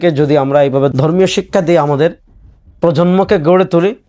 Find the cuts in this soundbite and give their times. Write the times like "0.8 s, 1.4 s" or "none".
0.9 s